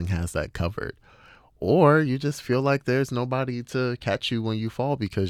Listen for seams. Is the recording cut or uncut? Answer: uncut